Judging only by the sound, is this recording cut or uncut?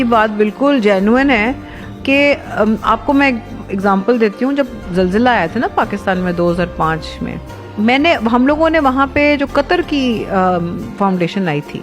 uncut